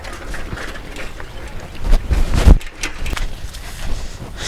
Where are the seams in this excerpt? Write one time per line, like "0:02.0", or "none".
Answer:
0:03.1